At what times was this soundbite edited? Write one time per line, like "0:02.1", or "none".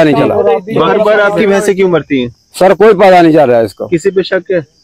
0:00.9